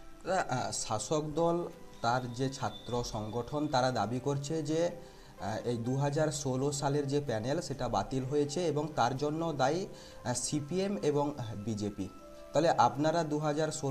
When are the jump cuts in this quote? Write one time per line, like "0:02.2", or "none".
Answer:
none